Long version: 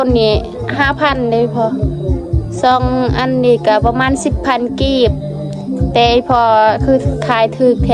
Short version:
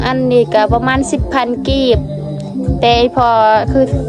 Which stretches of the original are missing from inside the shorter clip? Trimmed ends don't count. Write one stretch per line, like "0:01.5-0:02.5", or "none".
none